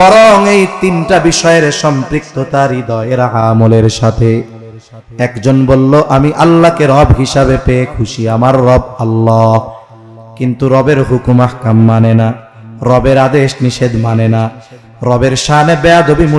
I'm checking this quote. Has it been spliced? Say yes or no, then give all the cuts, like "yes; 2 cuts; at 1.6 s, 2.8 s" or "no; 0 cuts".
no; 0 cuts